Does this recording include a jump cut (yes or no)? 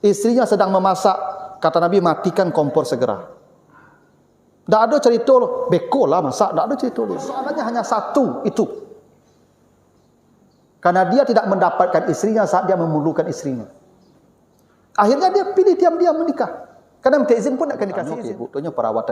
yes